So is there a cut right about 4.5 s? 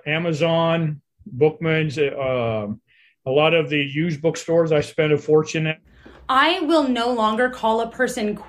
no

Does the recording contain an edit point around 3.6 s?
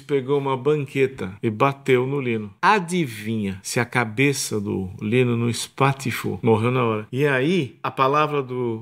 yes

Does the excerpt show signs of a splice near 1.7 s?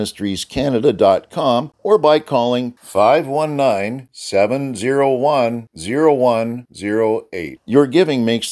yes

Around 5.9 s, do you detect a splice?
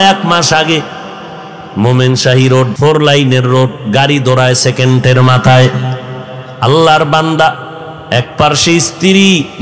no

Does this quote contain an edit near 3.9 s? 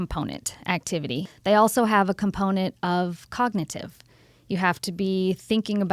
no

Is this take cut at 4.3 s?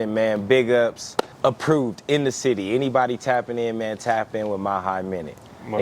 no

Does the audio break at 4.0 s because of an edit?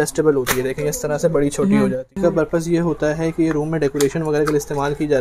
no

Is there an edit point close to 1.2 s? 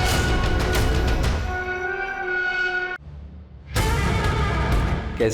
no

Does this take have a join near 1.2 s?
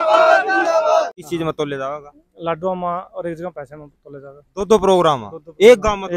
yes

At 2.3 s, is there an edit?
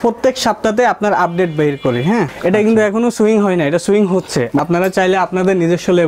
yes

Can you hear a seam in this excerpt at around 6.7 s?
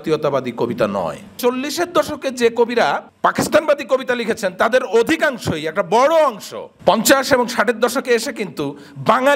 no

